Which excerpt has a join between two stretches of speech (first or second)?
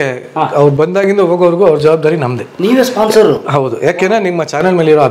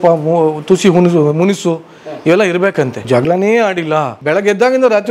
second